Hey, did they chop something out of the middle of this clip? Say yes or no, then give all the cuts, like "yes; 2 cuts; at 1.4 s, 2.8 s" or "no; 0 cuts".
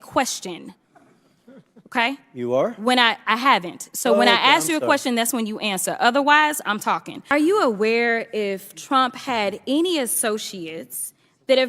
yes; 1 cut; at 7.1 s